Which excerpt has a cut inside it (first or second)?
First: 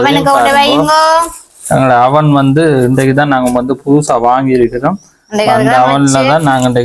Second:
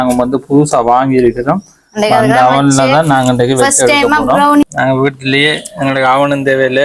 second